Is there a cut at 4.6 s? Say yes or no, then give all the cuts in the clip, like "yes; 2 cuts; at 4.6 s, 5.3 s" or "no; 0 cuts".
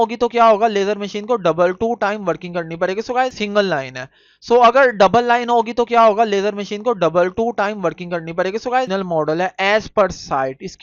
no; 2 cuts; at 3.3 s, 8.9 s